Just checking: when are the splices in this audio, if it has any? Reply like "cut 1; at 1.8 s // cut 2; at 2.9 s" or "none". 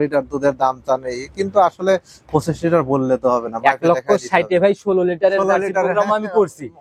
none

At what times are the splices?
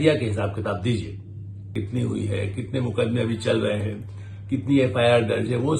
cut 1; at 1.7 s

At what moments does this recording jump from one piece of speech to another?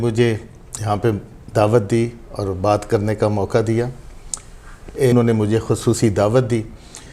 cut 1; at 5.1 s

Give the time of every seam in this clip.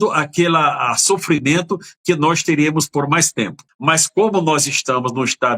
cut 1; at 3.7 s

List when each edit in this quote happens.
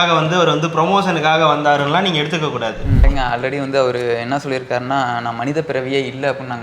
cut 1; at 3.1 s

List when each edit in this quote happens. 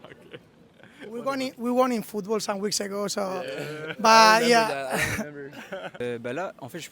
cut 1; at 6.0 s

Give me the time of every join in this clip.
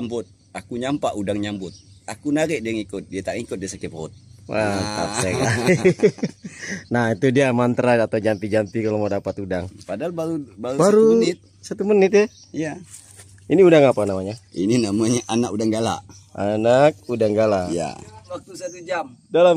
cut 1; at 18.3 s

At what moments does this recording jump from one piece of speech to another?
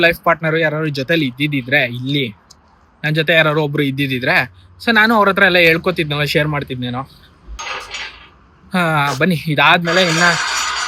none

